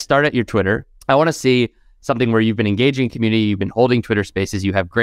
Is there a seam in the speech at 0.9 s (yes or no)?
yes